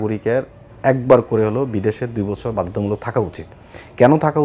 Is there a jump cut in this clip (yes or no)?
no